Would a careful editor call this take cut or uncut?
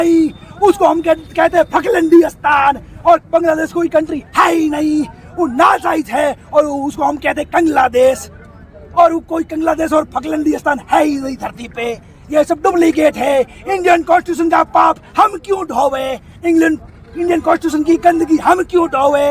uncut